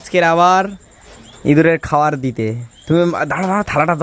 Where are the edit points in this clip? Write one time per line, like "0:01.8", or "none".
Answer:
none